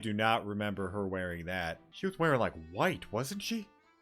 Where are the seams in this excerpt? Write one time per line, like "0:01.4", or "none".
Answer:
0:01.9